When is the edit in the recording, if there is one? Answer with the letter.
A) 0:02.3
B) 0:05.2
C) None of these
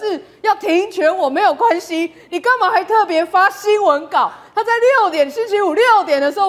C